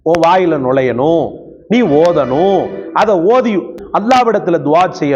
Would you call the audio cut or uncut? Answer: cut